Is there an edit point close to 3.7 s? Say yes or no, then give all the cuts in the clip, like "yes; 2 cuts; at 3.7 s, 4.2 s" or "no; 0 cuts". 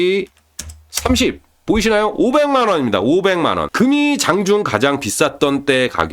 yes; 1 cut; at 3.7 s